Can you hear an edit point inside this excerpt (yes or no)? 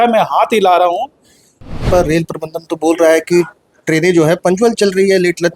yes